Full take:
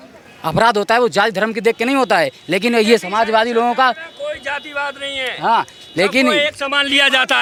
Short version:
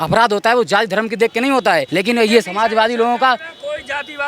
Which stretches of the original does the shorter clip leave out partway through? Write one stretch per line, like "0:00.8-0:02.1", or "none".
0:02.3-0:02.4